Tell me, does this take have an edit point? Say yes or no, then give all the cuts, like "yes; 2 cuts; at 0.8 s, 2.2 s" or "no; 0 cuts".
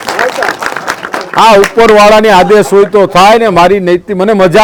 no; 0 cuts